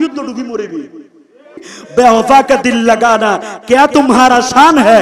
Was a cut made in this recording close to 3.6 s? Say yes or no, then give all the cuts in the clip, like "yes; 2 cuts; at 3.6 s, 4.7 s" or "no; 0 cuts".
no; 1 cut; at 1.7 s